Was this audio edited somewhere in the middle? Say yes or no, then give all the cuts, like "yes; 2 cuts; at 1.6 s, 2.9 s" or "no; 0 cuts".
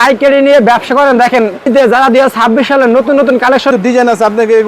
yes; 2 cuts; at 1.7 s, 3.7 s